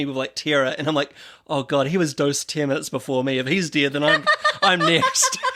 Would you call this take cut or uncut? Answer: uncut